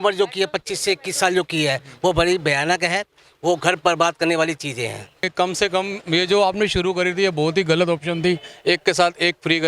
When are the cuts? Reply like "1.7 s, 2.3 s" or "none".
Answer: 5.3 s